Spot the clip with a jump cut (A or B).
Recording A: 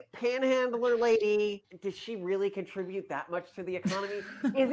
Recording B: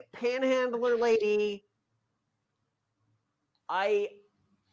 A